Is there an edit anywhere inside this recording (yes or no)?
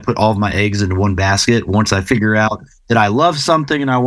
no